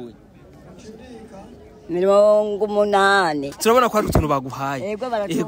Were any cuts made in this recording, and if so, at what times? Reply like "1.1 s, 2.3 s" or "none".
3.5 s